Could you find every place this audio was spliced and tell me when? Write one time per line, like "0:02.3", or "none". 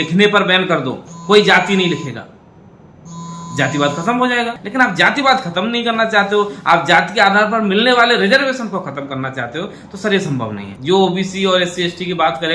0:04.6
0:10.7